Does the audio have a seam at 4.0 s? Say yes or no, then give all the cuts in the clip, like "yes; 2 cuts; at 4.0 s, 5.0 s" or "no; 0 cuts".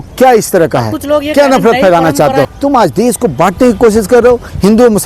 no; 1 cut; at 2.5 s